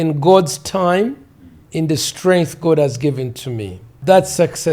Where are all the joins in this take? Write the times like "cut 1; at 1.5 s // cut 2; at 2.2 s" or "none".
cut 1; at 1.6 s // cut 2; at 3.9 s

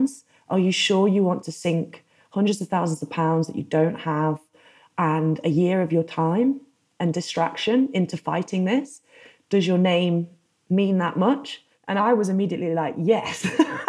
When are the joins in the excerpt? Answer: cut 1; at 11.9 s

